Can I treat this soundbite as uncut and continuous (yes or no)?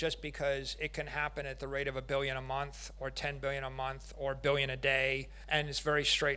no